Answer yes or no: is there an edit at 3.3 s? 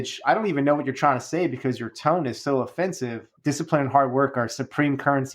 yes